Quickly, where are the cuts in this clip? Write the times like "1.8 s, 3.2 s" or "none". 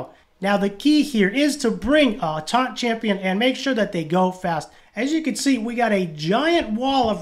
4.8 s